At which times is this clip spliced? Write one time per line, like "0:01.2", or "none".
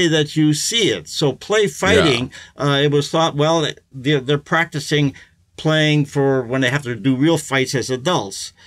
none